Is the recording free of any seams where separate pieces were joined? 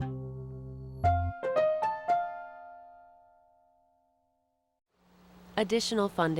yes; 0 cuts

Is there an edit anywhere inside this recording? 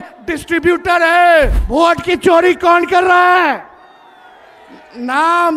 yes; 1 cut; at 1.6 s

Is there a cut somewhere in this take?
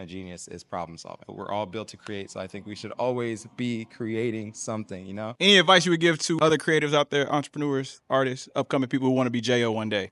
yes; 3 cuts; at 1.3 s, 5.3 s, 6.4 s

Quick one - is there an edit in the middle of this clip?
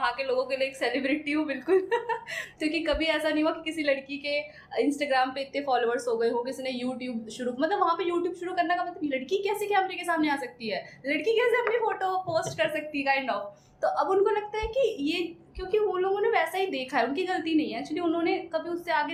no; 0 cuts

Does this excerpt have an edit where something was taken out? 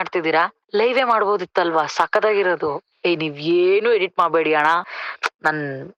no; 0 cuts

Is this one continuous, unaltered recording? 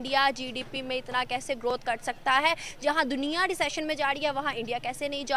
yes; 0 cuts

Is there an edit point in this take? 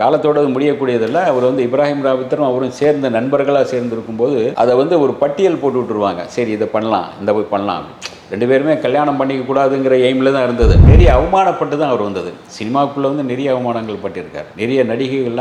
yes; 1 cut; at 10.9 s

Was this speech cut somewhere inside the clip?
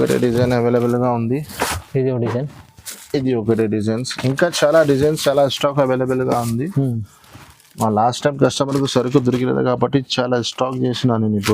no; 0 cuts

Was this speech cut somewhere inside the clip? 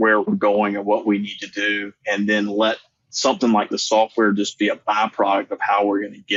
no; 0 cuts

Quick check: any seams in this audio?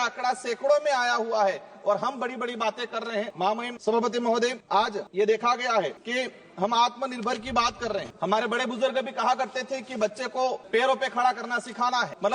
no; 0 cuts

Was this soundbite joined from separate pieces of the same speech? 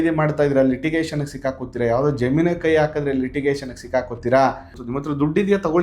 yes; 1 cut; at 4.7 s

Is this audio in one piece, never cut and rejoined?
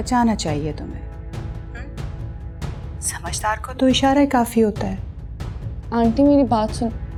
yes; 0 cuts

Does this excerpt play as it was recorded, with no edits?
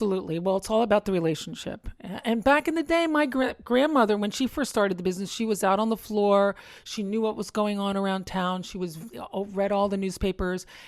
yes; 0 cuts

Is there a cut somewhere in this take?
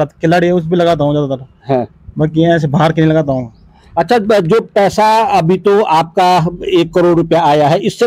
no; 0 cuts

